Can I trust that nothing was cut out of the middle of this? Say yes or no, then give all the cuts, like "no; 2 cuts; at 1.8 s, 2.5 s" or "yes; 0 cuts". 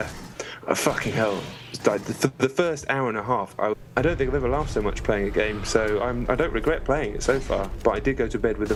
yes; 0 cuts